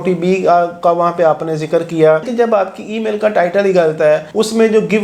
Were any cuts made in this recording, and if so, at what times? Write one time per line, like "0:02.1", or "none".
0:02.3